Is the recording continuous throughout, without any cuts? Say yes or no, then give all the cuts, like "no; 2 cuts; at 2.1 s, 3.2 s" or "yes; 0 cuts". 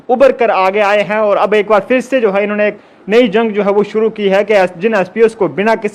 yes; 0 cuts